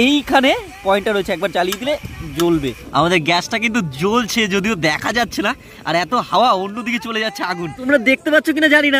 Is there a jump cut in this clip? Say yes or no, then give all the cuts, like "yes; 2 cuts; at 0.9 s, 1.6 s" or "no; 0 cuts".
no; 0 cuts